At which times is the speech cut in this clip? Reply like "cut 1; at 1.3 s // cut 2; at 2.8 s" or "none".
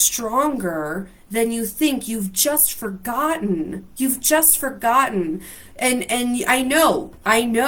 none